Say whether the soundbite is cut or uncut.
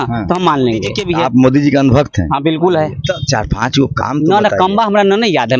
cut